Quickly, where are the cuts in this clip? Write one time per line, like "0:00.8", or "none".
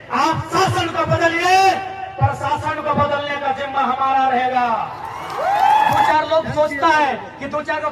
0:06.1